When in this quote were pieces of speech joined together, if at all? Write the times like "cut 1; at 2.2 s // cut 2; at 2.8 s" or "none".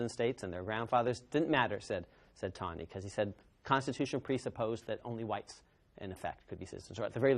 cut 1; at 2.8 s